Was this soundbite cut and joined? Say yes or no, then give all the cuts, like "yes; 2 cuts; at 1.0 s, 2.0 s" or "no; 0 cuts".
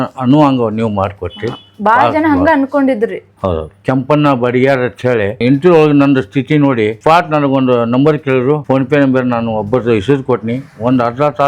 yes; 2 cuts; at 3.7 s, 5.4 s